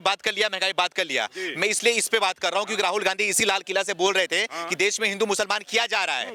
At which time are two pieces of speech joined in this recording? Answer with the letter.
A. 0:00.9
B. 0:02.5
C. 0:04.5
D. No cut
D